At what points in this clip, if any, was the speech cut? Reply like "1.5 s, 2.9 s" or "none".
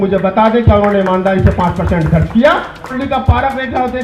2.9 s